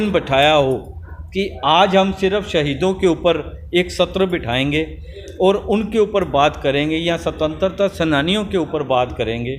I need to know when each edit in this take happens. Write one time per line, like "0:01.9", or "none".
none